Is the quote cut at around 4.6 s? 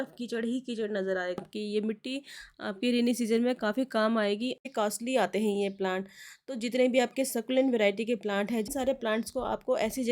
yes; 3 cuts; at 1.4 s, 4.6 s, 8.7 s

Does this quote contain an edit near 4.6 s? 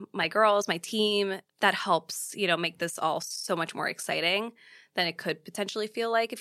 no; 1 cut; at 1.4 s

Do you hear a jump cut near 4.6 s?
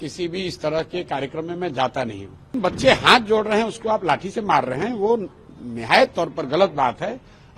no; 1 cut; at 2.5 s

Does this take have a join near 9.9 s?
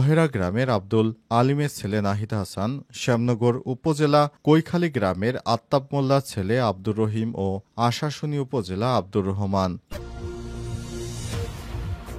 yes; 1 cut; at 9.9 s

